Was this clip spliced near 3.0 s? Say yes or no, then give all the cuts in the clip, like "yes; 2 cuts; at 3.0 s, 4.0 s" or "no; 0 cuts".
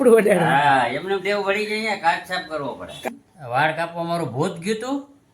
yes; 1 cut; at 3.0 s